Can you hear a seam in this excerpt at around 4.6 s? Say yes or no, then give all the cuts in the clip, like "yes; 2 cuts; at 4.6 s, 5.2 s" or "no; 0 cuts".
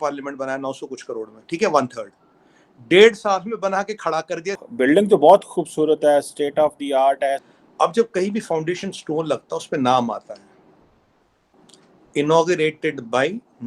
yes; 2 cuts; at 4.6 s, 7.4 s